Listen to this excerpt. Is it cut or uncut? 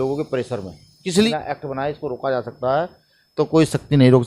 cut